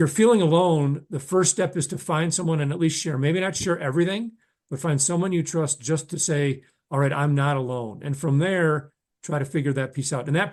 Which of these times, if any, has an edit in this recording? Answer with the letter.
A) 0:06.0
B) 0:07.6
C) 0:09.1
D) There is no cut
D